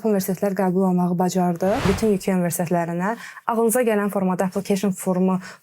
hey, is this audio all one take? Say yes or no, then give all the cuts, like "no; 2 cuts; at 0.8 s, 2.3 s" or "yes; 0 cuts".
no; 1 cut; at 1.9 s